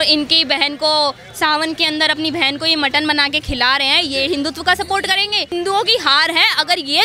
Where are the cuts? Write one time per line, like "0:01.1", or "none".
0:05.5